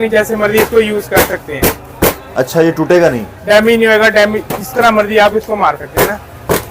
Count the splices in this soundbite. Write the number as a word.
zero